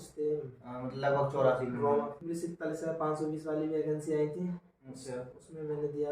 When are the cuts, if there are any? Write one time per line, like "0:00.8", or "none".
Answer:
0:02.2